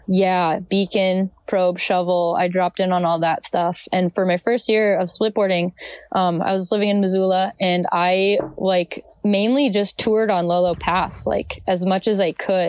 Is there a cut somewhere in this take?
no; 0 cuts

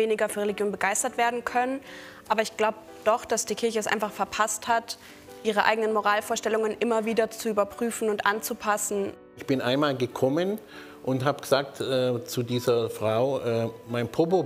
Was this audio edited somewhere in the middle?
yes; 1 cut; at 9.2 s

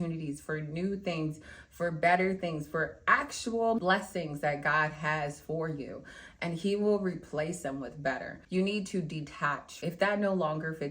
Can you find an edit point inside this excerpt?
yes; 3 cuts; at 3.8 s, 8.4 s, 9.7 s

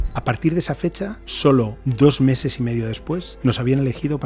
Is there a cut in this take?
yes; 3 cuts; at 1.2 s, 1.8 s, 3.3 s

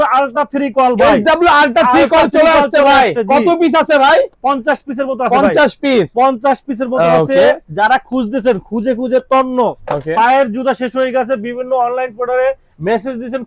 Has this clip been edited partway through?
no; 0 cuts

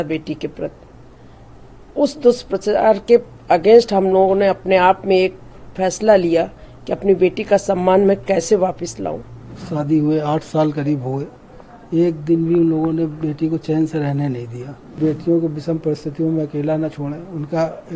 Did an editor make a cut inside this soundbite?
yes; 2 cuts; at 9.5 s, 15.0 s

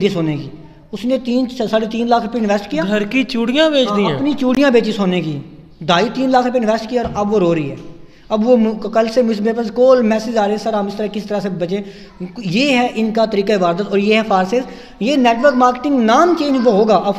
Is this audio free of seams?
yes; 0 cuts

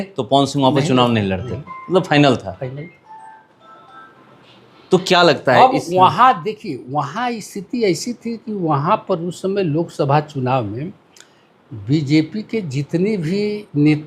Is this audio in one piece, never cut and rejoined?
yes; 0 cuts

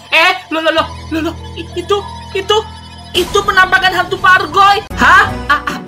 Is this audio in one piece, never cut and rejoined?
no; 1 cut; at 4.9 s

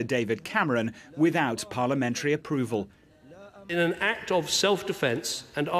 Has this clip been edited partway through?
yes; 1 cut; at 4.7 s

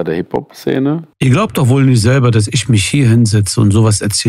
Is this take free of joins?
no; 1 cut; at 1.1 s

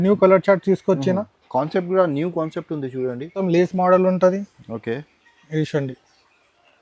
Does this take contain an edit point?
yes; 1 cut; at 3.4 s

